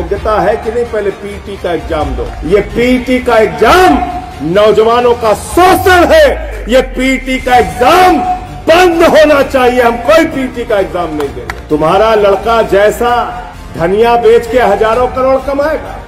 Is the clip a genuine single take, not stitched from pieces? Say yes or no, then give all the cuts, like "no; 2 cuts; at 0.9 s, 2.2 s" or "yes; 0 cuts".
no; 3 cuts; at 2.3 s, 6.5 s, 11.5 s